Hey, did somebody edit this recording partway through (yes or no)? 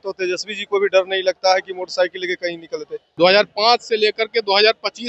yes